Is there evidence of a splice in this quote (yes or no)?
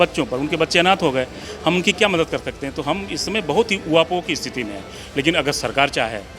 yes